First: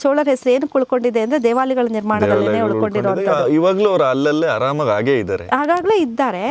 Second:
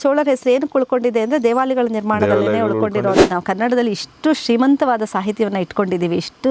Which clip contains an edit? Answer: second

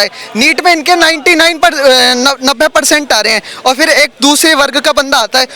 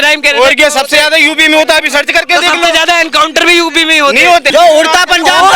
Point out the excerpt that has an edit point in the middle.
second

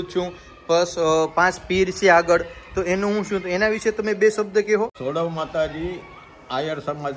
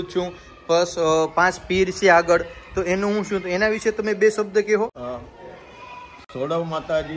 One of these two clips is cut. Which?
first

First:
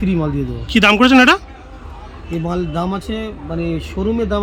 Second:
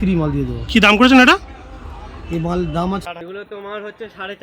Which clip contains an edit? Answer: second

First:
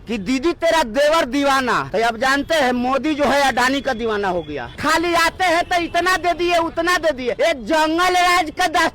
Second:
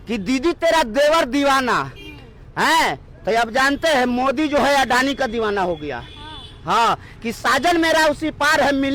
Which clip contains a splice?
first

